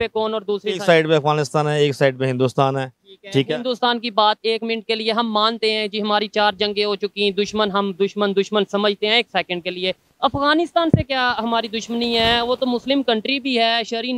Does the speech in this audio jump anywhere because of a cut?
no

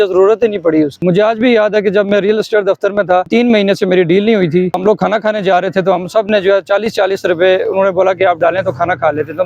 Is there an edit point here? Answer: yes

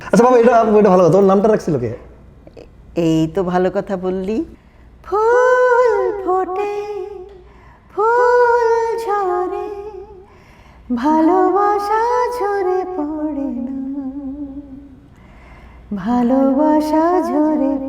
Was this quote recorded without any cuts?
no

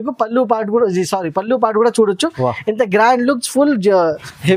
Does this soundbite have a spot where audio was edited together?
no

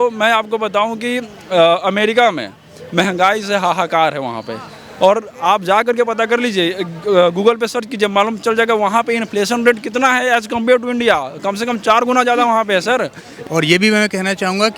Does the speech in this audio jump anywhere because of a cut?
yes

